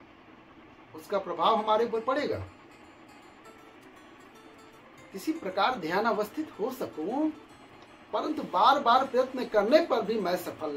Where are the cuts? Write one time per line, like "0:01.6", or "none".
0:03.1